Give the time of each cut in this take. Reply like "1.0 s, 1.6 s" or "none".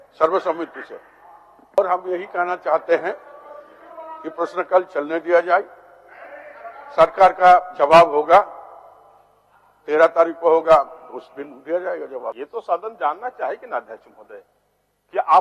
1.8 s, 12.4 s